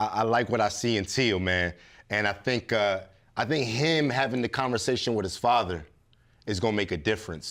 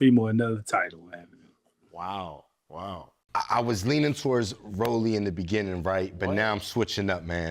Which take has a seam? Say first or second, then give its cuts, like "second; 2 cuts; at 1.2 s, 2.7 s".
second; 1 cut; at 3.1 s